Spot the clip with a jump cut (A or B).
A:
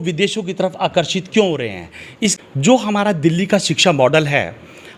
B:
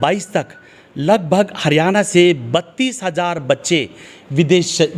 A